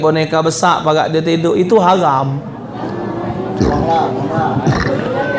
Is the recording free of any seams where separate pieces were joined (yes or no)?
yes